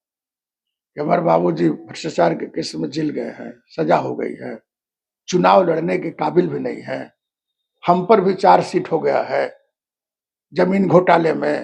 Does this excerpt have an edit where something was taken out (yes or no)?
no